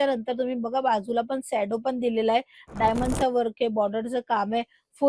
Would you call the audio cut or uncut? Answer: uncut